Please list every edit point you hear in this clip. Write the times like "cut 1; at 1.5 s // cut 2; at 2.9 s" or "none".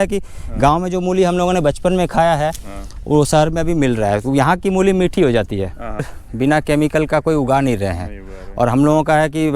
cut 1; at 6.1 s